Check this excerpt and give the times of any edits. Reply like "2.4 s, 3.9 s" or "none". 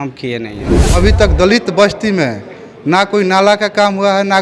1.0 s